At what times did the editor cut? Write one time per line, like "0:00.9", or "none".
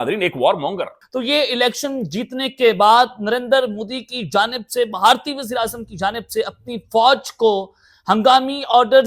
0:01.0